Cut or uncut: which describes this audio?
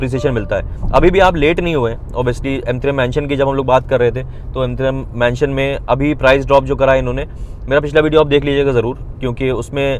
uncut